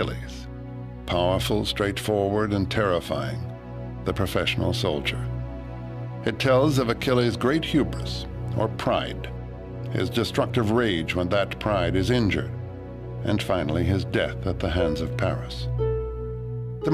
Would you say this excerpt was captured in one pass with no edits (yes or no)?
no